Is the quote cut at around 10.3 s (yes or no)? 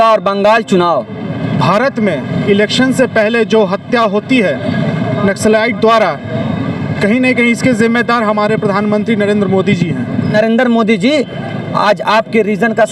yes